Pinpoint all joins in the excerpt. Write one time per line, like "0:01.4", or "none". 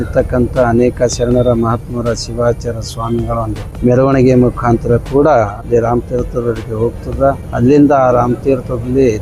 0:03.6
0:05.6
0:07.4